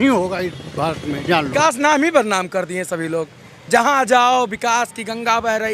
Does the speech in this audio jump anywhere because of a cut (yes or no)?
yes